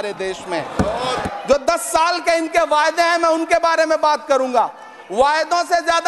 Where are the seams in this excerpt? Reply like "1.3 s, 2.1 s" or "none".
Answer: 1.2 s

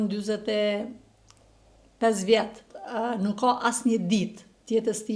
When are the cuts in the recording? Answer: 2.8 s

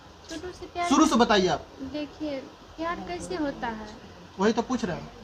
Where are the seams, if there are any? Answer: none

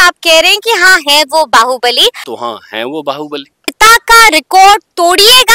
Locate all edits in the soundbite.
2.3 s, 3.7 s

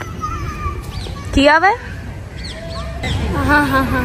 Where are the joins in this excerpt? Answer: 3.1 s

